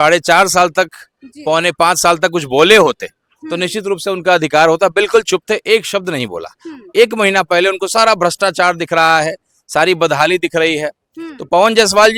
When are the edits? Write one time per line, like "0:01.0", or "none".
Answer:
none

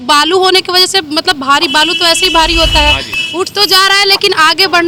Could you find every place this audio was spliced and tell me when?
none

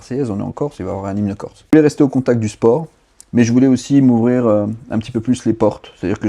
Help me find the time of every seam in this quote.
0:01.7

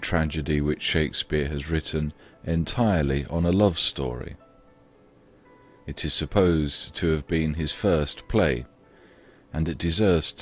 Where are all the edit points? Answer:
none

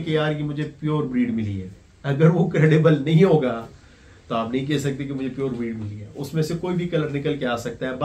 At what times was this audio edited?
none

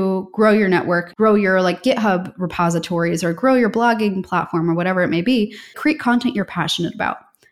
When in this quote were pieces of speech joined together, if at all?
0:01.1
0:05.8

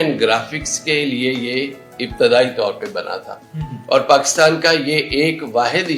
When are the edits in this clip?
none

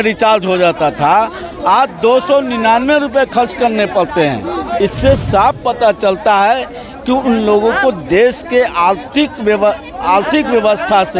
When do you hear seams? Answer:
0:04.8

